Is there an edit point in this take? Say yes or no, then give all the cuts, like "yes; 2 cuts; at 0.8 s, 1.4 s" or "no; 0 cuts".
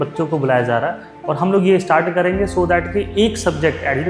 yes; 1 cut; at 1.1 s